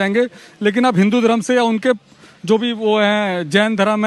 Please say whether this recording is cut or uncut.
uncut